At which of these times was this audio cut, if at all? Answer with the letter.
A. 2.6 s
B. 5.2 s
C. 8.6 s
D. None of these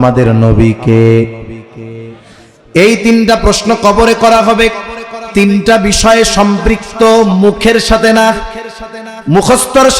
B